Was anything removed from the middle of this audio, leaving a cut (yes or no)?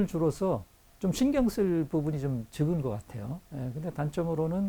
yes